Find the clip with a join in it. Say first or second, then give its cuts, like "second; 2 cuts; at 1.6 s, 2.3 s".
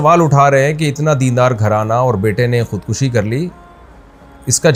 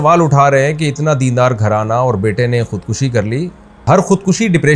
second; 1 cut; at 3.8 s